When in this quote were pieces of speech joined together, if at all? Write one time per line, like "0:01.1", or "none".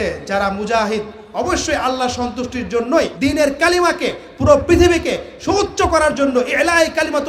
none